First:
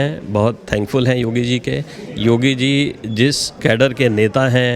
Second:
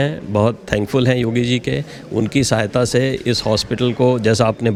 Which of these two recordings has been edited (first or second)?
first